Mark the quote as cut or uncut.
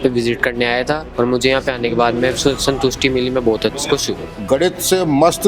cut